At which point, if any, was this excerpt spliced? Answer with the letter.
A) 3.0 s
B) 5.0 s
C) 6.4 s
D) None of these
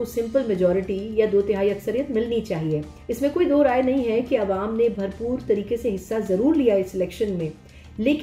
A